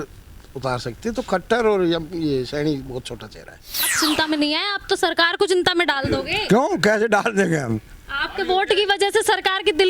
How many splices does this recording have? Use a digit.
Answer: 1